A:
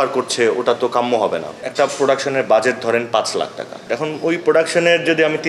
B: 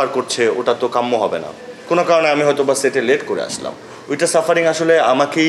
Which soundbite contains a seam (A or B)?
A